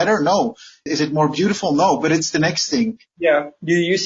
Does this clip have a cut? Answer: yes; 1 cut; at 3.0 s

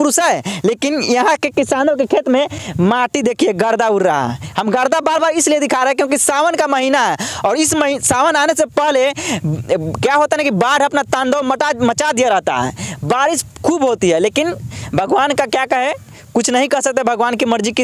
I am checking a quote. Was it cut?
no; 0 cuts

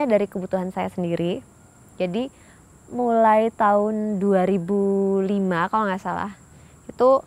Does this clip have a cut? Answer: no; 0 cuts

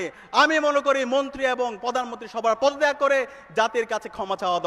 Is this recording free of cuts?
yes; 0 cuts

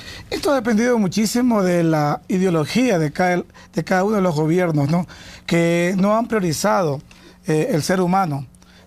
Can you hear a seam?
yes; 1 cut; at 6.7 s

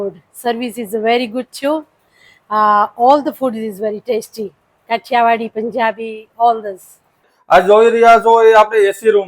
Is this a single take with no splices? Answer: no; 1 cut; at 7.3 s

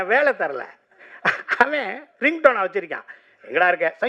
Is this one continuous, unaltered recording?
yes; 0 cuts

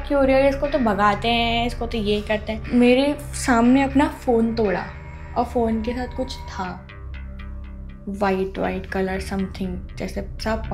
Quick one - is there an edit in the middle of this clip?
yes; 1 cut; at 2.6 s

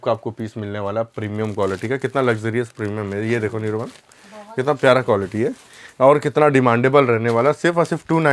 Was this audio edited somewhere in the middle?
no; 0 cuts

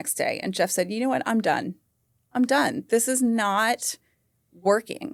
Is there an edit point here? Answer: no; 0 cuts

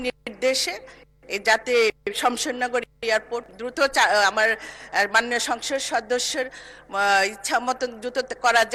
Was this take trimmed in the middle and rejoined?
no; 0 cuts

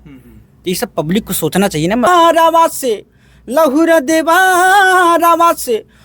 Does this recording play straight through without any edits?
no; 1 cut; at 2.1 s

